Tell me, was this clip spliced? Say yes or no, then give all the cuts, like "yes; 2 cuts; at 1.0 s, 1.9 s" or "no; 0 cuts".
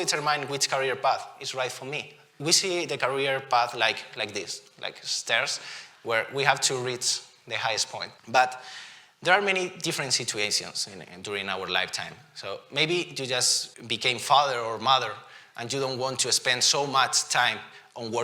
yes; 3 cuts; at 2.4 s, 8.1 s, 13.6 s